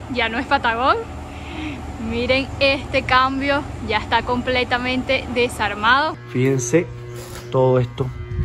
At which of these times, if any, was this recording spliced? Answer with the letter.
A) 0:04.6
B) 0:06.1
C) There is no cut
B